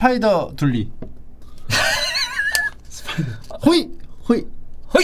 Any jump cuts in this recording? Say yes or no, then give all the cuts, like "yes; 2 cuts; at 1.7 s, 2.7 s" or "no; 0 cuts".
no; 0 cuts